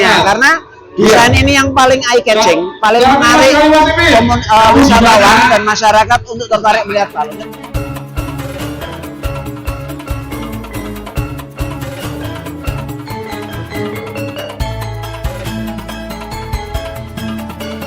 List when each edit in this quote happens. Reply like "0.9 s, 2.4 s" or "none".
none